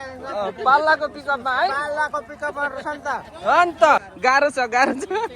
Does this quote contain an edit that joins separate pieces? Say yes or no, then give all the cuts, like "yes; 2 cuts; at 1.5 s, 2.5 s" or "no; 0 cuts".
yes; 1 cut; at 4.1 s